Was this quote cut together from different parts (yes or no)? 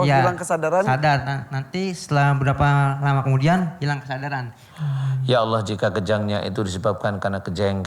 yes